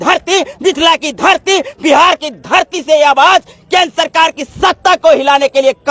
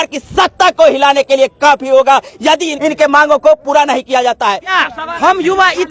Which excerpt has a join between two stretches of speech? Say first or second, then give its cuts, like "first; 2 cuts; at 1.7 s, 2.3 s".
second; 2 cuts; at 2.7 s, 4.8 s